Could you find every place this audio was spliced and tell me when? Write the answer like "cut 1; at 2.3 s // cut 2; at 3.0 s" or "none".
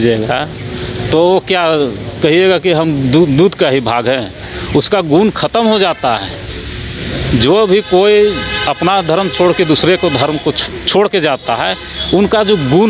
none